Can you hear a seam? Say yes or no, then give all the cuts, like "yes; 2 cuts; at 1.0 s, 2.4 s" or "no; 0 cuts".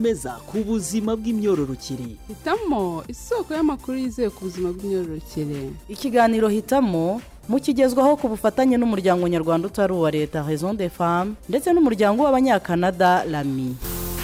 no; 0 cuts